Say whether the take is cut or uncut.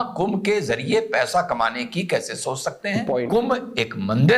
cut